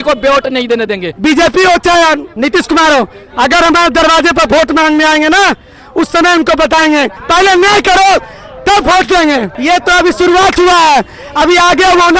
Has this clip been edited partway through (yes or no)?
yes